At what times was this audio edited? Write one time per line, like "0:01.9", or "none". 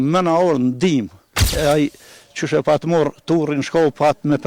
0:01.4